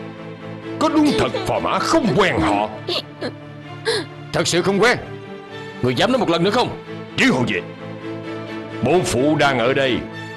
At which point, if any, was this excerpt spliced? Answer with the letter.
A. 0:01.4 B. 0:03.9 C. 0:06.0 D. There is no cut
D